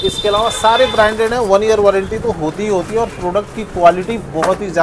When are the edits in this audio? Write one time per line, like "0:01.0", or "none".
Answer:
none